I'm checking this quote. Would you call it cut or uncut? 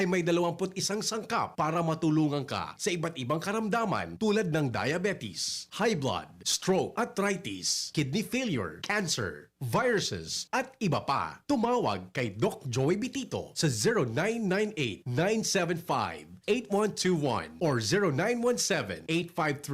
uncut